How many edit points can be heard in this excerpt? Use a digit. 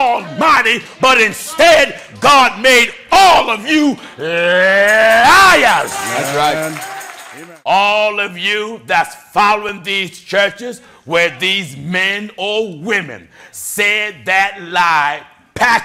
1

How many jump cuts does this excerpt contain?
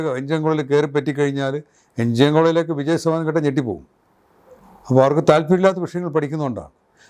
0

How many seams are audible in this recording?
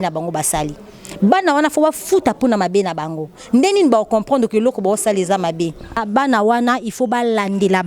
1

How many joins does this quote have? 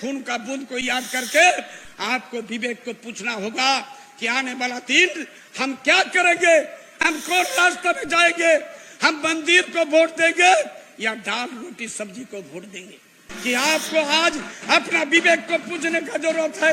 1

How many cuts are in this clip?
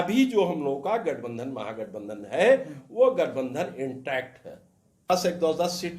1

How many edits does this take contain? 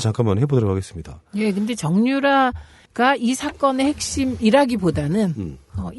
1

